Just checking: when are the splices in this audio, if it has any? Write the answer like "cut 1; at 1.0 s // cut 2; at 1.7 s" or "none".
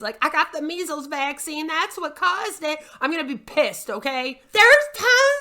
cut 1; at 4.4 s